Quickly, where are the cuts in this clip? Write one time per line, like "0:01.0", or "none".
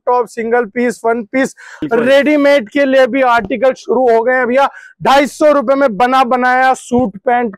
0:01.8